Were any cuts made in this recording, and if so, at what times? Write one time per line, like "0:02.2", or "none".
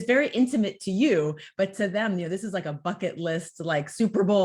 none